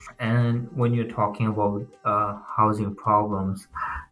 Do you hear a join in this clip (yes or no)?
no